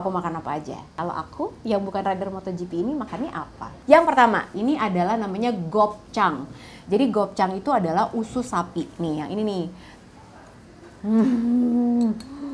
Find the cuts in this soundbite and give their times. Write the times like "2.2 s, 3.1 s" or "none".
0.9 s, 3.8 s